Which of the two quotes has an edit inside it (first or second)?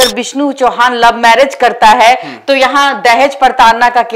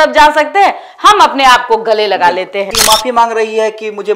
second